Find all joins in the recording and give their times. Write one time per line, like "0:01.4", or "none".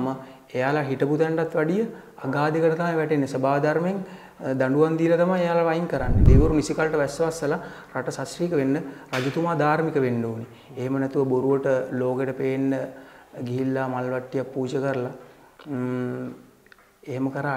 0:06.2